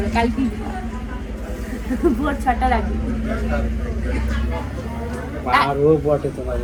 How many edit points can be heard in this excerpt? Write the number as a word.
zero